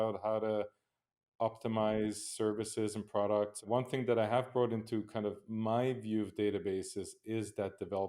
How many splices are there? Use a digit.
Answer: 1